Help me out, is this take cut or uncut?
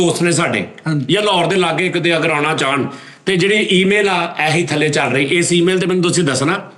uncut